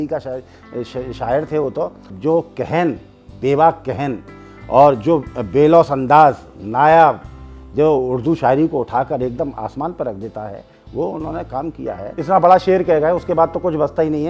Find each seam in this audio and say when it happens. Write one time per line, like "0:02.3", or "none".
0:02.1
0:12.1